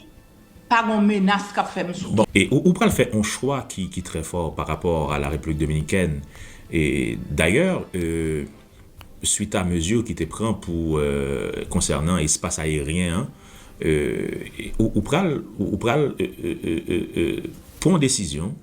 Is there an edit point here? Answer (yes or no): yes